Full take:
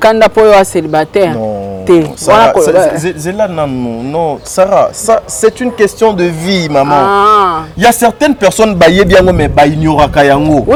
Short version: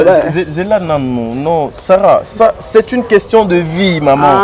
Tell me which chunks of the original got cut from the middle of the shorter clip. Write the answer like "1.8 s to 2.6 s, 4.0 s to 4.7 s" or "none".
none